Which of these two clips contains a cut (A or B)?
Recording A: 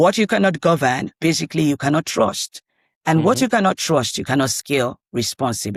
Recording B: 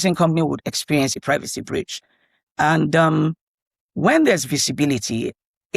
B